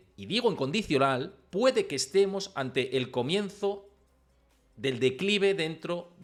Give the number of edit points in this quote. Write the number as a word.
zero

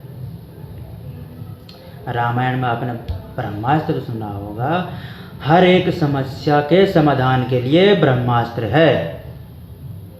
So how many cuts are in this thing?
zero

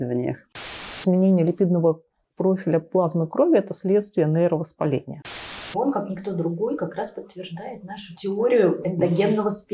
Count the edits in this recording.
two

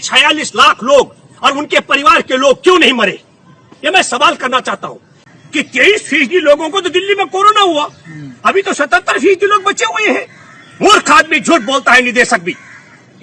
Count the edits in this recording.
one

